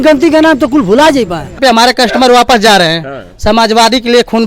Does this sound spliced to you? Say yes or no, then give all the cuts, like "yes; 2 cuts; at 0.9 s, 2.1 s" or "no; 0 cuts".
yes; 1 cut; at 1.6 s